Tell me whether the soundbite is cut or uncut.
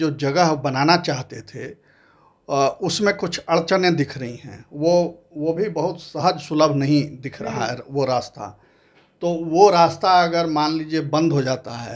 uncut